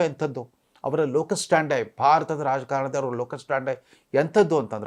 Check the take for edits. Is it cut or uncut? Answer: uncut